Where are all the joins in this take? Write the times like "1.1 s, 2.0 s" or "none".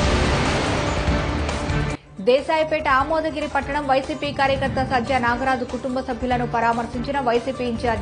none